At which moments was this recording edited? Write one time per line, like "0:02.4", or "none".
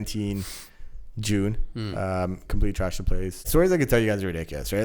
0:03.5